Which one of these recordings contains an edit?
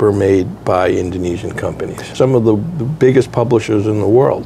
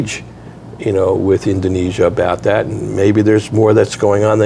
first; 1 cut; at 2.0 s

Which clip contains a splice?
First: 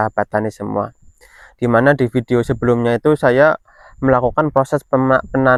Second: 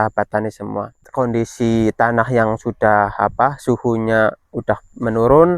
second; 1 cut; at 1.0 s

